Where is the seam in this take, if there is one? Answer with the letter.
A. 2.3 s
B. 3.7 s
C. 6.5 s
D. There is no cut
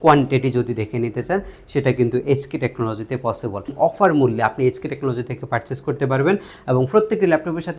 B